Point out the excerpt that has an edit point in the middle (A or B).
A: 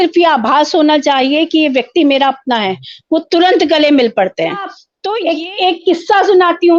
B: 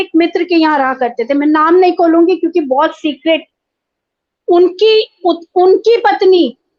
A